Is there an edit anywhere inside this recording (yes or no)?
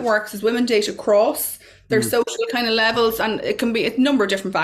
no